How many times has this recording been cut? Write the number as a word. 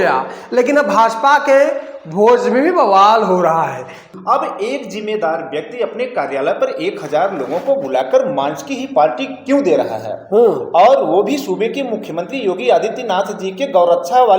one